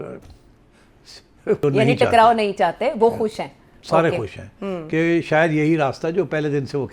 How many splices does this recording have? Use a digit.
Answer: 1